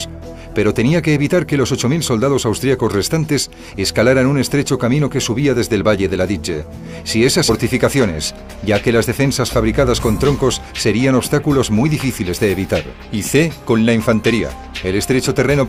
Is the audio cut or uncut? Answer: uncut